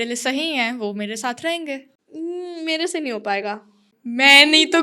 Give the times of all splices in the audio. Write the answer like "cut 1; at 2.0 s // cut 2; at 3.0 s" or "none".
cut 1; at 3.9 s

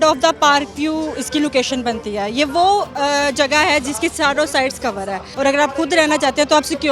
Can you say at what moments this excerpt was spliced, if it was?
cut 1; at 5.2 s

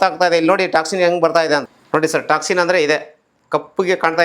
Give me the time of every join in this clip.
cut 1; at 1.6 s

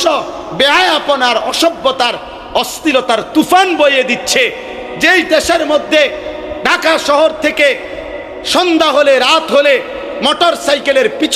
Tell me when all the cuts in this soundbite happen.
none

